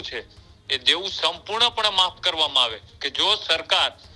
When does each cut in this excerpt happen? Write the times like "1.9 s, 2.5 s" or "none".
2.9 s